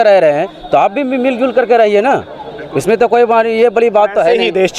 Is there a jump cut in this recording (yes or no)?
no